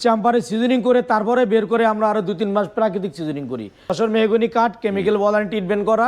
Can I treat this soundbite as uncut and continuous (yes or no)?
no